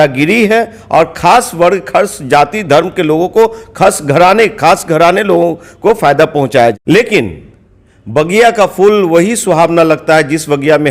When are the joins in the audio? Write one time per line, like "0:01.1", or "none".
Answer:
0:06.7